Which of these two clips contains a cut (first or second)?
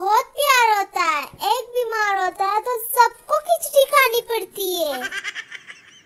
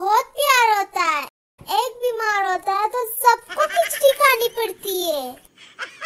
first